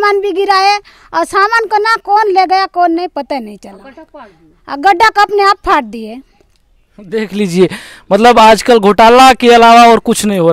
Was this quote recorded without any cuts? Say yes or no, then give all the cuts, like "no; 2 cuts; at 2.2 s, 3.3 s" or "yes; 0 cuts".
yes; 0 cuts